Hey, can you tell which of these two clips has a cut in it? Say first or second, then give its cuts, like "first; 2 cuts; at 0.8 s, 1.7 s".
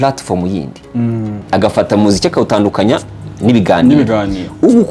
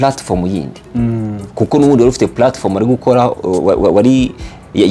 first; 1 cut; at 1.3 s